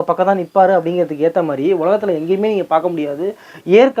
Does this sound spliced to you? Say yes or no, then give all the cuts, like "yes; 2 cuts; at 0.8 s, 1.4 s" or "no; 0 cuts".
no; 0 cuts